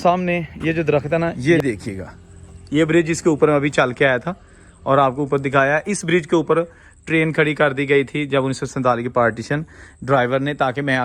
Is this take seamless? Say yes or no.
no